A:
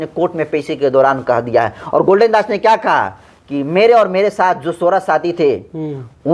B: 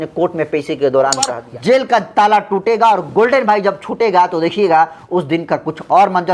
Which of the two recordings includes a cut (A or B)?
B